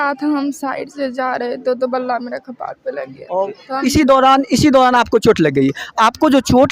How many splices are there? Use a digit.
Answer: 1